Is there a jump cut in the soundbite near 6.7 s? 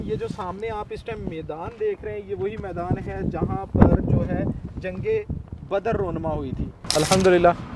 yes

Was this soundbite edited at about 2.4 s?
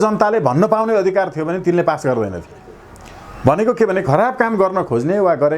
no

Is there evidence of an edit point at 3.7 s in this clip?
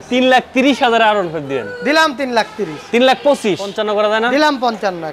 yes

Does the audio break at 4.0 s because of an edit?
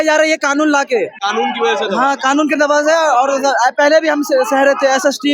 no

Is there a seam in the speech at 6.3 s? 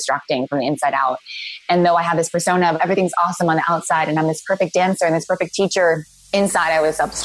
yes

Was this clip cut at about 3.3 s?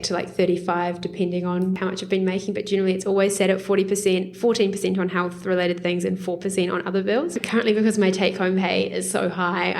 no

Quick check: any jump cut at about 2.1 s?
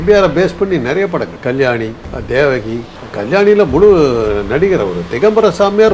yes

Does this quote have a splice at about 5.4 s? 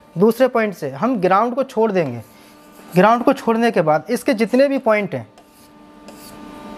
no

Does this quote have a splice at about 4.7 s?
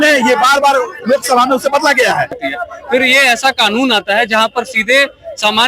no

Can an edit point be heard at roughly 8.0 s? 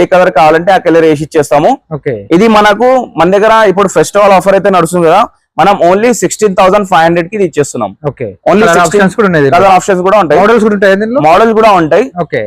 no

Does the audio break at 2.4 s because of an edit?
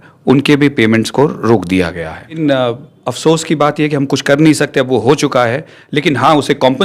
yes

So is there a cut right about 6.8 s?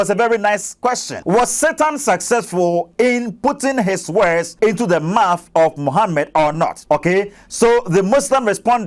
yes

